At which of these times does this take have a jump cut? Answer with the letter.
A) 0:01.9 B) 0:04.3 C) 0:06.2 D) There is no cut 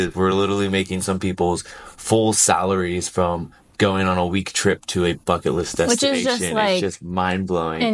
D